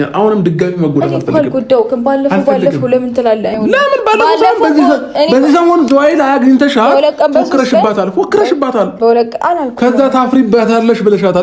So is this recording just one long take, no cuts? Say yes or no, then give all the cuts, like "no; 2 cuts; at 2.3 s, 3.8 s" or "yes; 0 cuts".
no; 1 cut; at 3.5 s